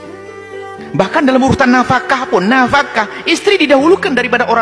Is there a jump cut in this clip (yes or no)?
no